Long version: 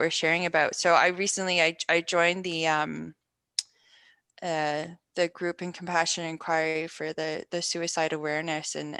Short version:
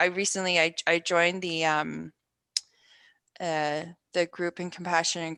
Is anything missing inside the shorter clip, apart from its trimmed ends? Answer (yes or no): no